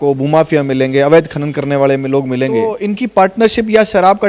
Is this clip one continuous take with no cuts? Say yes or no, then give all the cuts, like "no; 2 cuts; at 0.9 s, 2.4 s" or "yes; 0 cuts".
no; 1 cut; at 2.8 s